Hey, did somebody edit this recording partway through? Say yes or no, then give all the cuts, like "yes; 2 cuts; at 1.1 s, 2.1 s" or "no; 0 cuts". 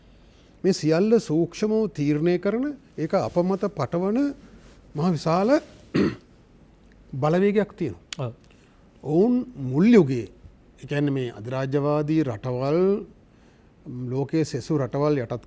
no; 0 cuts